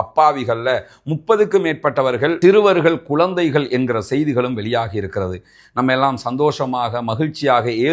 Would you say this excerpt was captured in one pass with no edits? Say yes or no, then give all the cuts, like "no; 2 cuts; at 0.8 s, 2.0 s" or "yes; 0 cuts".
yes; 0 cuts